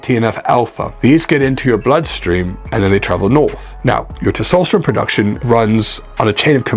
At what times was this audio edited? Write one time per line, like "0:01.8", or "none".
none